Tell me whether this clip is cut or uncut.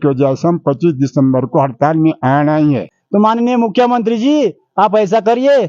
cut